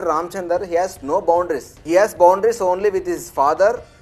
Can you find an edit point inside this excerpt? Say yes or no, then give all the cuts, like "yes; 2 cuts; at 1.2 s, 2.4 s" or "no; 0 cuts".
no; 0 cuts